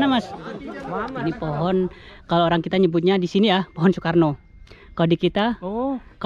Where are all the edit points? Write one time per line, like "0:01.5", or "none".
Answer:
0:01.2